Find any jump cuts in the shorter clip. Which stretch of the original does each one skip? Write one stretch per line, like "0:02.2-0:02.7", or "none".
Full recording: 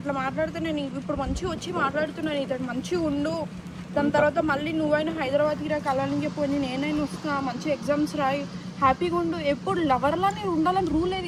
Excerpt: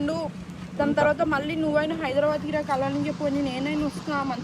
none

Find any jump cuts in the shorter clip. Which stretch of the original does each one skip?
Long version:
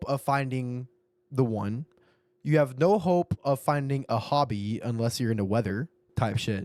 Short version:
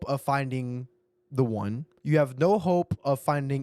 0:01.9-0:02.3

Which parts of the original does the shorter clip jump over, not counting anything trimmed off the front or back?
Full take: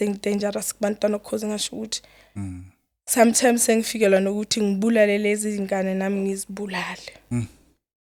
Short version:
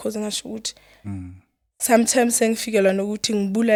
none

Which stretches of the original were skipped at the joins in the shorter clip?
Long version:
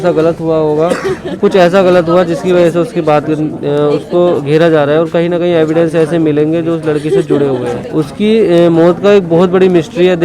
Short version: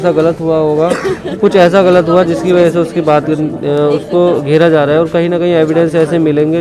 none

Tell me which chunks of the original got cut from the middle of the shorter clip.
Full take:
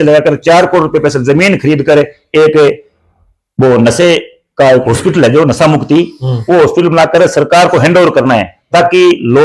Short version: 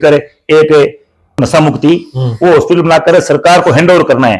0:03.2-0:05.5

